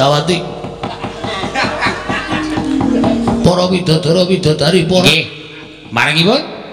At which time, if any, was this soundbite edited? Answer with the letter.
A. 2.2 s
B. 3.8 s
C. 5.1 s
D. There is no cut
C